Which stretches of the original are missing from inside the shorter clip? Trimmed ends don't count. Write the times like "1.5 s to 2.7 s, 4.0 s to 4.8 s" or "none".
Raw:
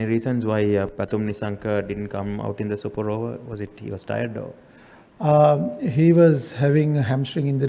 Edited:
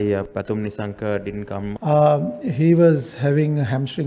2.4 s to 5.1 s

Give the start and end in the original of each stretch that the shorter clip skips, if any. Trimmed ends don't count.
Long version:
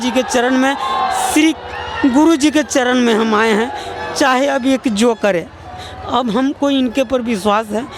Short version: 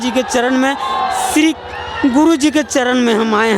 none

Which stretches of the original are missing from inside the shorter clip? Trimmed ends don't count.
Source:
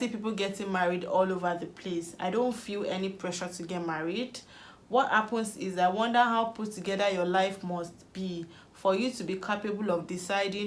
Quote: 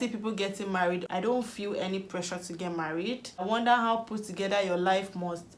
1.0 s to 2.1 s, 4.5 s to 5.9 s

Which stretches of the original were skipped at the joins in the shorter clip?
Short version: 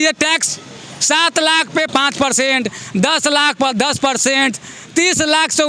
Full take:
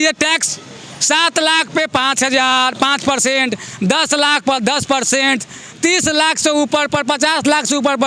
1.9 s to 2.8 s

